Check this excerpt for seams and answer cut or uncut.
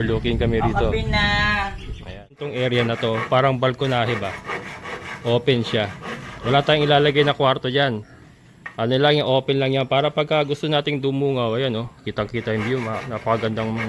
cut